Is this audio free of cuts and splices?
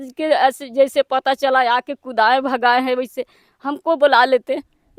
yes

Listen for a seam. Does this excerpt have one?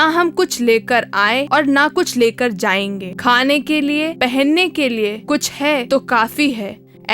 yes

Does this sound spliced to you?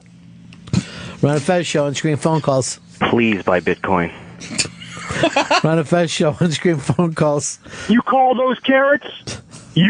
yes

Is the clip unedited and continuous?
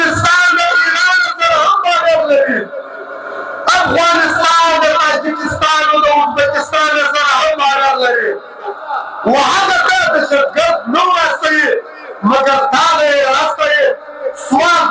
no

